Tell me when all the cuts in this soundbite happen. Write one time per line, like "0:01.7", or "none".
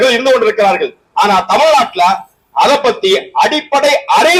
none

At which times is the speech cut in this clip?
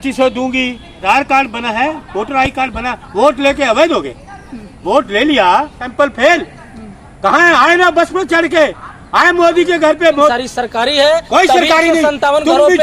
0:01.0
0:05.8
0:10.3

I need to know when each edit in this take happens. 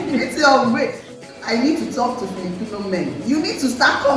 0:01.2

